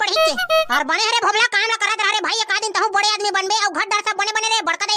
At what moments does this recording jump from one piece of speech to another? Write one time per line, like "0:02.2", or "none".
none